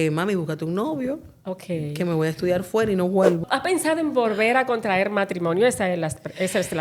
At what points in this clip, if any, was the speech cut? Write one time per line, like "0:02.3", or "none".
0:03.4